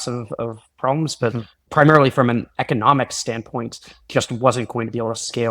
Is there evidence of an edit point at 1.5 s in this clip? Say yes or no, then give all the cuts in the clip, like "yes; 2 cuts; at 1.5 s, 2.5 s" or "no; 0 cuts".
yes; 1 cut; at 1.5 s